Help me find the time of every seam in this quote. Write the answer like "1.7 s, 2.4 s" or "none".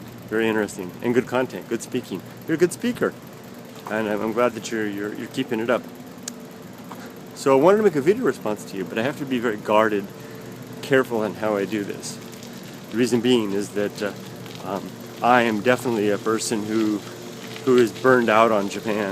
7.5 s